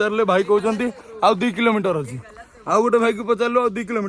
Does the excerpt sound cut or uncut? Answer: uncut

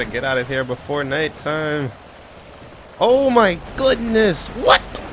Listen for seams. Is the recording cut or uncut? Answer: uncut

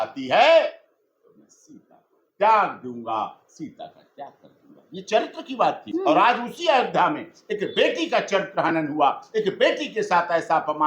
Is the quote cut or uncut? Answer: cut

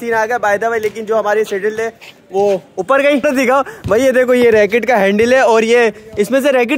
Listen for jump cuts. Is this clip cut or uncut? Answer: cut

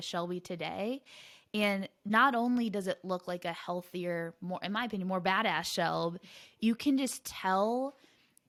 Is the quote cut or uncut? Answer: uncut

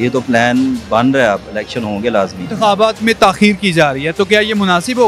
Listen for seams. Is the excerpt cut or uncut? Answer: cut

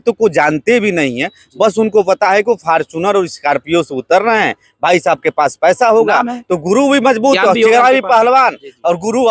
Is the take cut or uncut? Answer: uncut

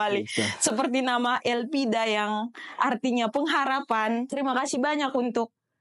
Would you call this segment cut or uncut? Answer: cut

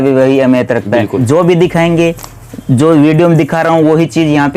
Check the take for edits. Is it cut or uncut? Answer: cut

